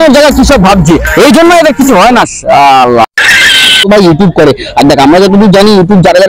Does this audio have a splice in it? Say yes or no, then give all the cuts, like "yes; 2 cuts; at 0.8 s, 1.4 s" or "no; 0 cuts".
yes; 1 cut; at 3.8 s